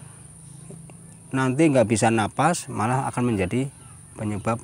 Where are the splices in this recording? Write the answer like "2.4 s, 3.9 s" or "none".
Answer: none